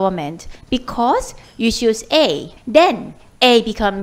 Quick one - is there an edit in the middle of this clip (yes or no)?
yes